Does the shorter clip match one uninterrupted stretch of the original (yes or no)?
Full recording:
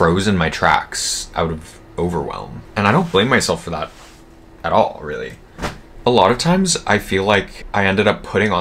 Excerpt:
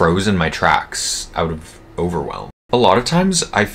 no